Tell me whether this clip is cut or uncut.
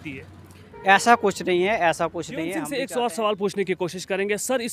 cut